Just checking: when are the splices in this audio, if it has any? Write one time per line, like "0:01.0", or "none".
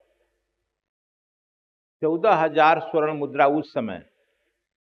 none

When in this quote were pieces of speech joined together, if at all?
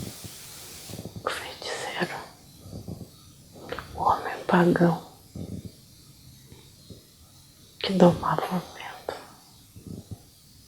0:03.4
0:07.0

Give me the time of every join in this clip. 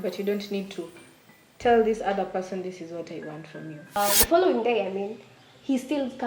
0:04.0

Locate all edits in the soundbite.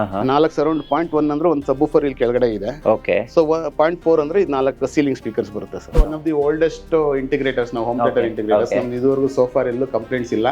0:05.9

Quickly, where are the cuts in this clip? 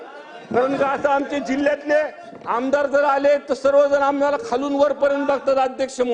none

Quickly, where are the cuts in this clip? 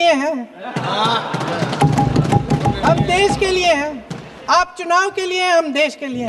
none

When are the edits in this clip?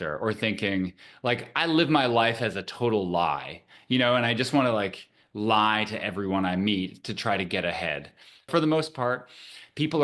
0:08.5

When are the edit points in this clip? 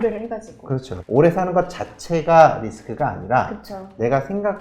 0:01.0

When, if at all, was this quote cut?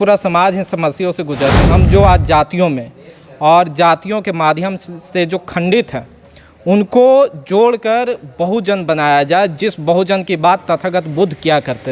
0:01.6

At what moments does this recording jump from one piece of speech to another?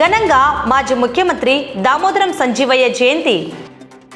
none

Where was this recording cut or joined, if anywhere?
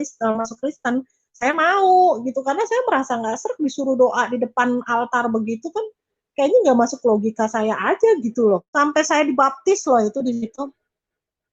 0:08.7

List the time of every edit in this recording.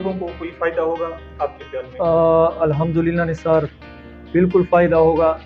none

